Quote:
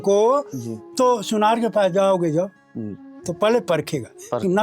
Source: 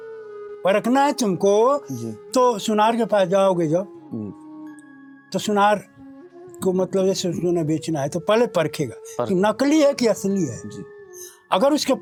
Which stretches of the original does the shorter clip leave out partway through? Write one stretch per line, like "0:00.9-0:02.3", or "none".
0:04.7-0:08.2